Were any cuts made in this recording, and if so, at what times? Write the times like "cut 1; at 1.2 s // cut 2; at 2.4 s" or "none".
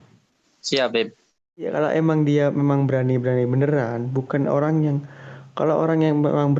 cut 1; at 1.7 s